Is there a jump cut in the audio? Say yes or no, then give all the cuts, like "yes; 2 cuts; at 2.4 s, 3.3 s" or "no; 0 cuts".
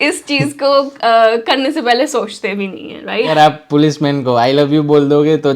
yes; 1 cut; at 3.3 s